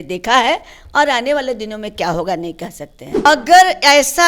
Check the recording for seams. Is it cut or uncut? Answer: cut